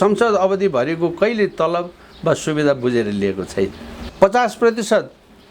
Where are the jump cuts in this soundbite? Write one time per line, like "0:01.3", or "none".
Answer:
0:04.1